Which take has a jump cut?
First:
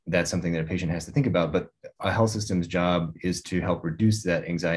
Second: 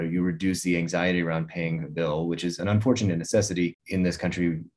second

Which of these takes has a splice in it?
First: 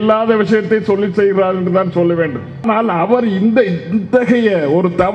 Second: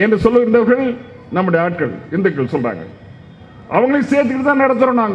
first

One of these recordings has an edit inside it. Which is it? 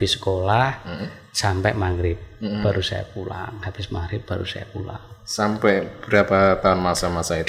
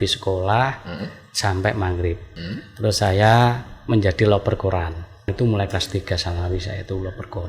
second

